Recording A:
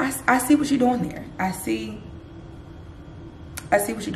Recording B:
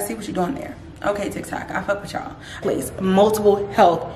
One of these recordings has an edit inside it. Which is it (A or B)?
B